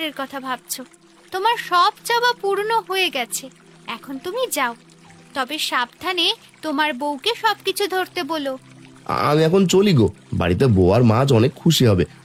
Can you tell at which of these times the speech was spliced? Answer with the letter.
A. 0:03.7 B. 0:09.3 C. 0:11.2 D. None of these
D